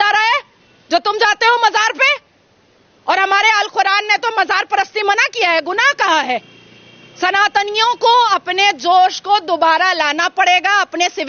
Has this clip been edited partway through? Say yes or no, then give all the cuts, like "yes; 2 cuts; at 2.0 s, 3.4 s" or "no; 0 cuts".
no; 0 cuts